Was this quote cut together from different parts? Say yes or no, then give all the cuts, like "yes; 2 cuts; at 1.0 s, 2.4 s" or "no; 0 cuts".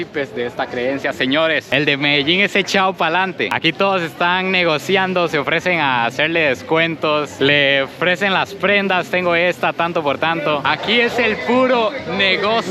yes; 1 cut; at 1.7 s